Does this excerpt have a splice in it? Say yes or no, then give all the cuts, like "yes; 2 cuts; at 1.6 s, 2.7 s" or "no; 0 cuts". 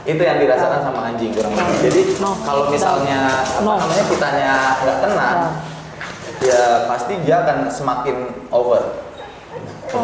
no; 0 cuts